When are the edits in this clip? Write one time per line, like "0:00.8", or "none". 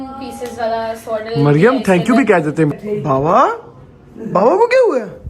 0:02.7